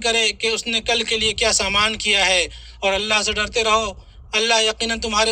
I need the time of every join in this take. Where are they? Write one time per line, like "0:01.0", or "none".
none